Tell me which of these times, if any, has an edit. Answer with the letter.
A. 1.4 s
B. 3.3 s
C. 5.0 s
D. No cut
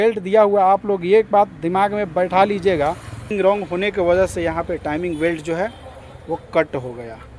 B